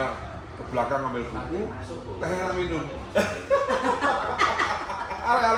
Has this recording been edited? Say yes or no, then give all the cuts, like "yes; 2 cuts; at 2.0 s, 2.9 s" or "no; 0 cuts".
no; 0 cuts